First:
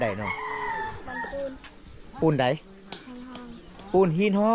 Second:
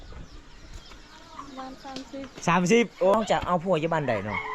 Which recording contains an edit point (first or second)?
second